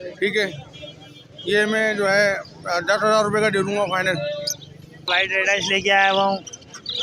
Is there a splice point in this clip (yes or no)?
yes